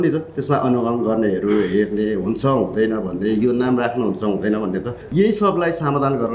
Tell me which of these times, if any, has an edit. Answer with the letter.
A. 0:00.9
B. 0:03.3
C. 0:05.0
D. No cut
C